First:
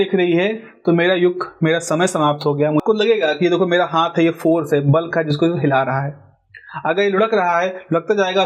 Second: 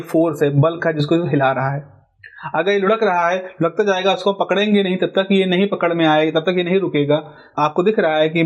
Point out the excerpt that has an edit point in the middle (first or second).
first